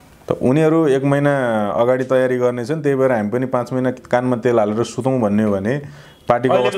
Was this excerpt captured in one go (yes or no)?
yes